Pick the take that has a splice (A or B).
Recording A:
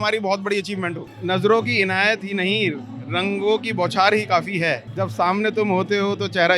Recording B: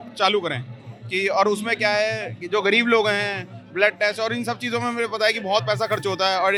A